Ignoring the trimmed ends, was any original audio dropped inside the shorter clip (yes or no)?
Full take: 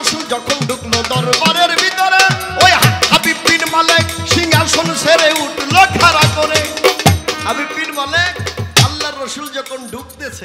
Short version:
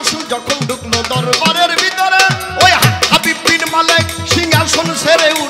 no